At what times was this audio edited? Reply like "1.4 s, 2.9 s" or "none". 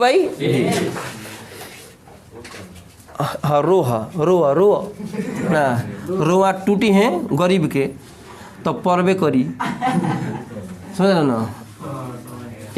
none

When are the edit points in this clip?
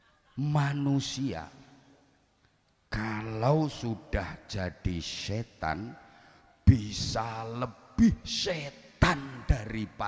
none

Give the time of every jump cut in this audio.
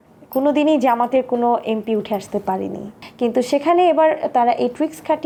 none

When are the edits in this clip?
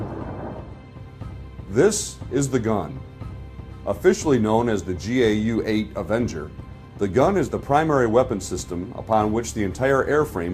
5.3 s

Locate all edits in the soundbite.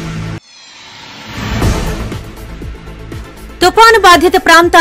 3.2 s

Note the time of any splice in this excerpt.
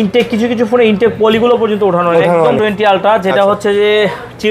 2.6 s

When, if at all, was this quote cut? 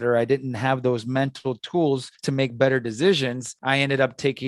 2.1 s, 3.5 s

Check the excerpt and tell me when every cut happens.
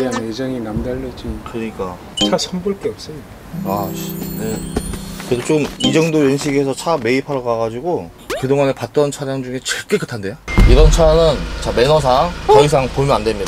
2.0 s, 10.4 s

